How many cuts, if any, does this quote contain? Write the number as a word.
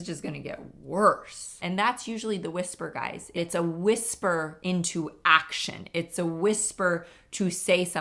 two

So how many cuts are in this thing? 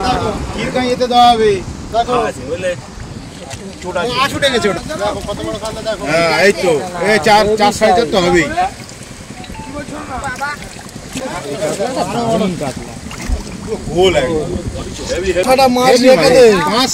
three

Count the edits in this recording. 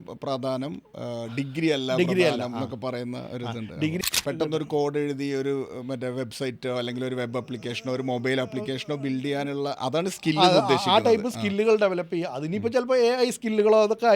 one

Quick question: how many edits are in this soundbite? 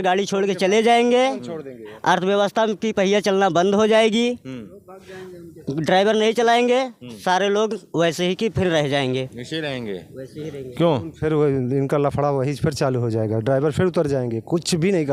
zero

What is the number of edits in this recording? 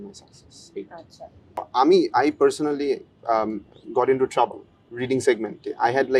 one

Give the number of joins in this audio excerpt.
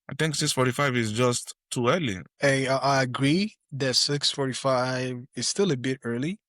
one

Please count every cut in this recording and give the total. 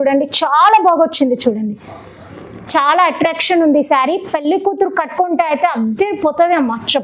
zero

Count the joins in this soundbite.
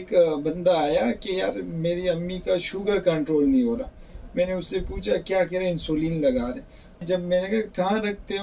zero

